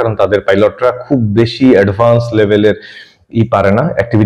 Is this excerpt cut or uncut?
uncut